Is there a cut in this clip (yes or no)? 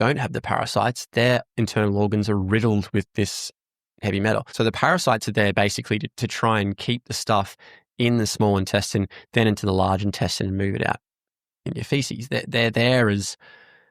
yes